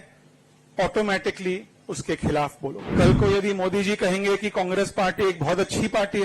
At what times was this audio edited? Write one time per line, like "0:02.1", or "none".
0:02.8